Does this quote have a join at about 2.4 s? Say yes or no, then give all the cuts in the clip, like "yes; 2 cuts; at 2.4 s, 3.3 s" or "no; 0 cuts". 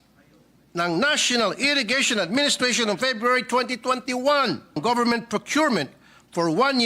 no; 1 cut; at 4.8 s